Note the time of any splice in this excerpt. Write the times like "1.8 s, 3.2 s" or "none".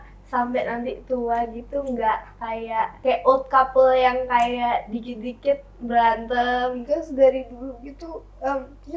3.0 s, 6.8 s